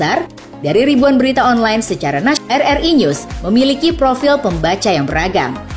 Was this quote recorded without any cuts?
no; 1 cut; at 2.4 s

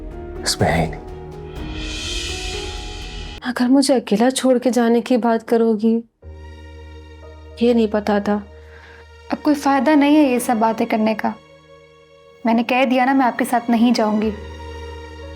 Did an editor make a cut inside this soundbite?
yes; 1 cut; at 3.3 s

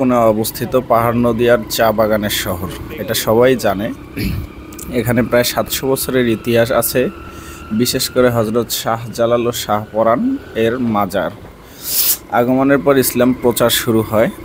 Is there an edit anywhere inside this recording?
no; 0 cuts

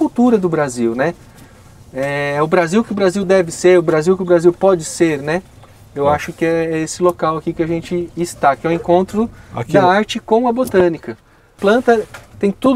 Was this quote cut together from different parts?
yes; 1 cut; at 11.6 s

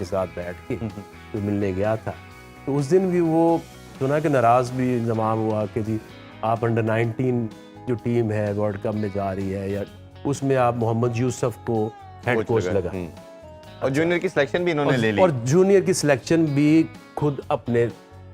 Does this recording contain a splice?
no; 0 cuts

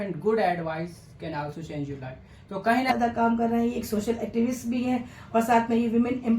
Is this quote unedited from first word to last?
no; 1 cut; at 2.9 s

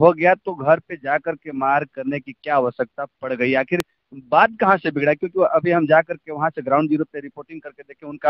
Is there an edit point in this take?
no; 0 cuts

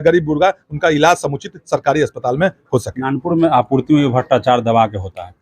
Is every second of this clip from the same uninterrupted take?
yes; 0 cuts

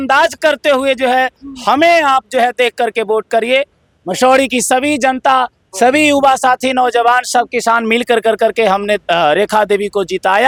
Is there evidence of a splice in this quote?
no; 0 cuts

